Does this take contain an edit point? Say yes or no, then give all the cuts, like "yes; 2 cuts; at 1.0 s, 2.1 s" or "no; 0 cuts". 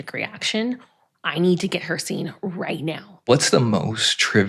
yes; 1 cut; at 3.2 s